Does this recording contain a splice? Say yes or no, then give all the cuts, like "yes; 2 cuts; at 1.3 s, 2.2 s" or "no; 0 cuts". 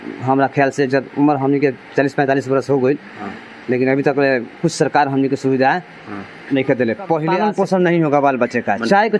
yes; 1 cut; at 7.3 s